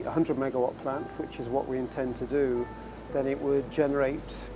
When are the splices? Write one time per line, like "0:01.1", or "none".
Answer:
none